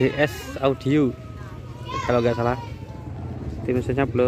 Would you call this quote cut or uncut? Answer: uncut